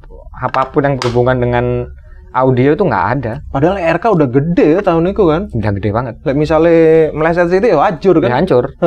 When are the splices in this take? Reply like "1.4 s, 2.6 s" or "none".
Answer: none